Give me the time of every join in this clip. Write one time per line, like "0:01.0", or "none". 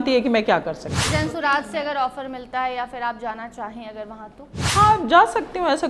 0:01.1